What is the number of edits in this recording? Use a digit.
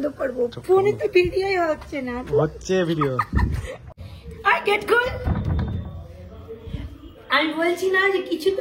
1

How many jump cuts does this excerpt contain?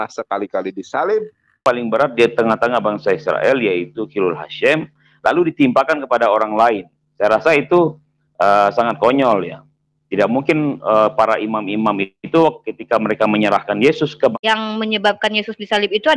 2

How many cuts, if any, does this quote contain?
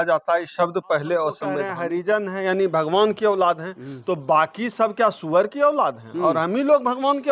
1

